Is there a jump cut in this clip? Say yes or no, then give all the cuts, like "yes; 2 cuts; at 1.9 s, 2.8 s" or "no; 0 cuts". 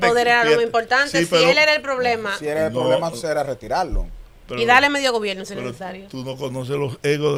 no; 0 cuts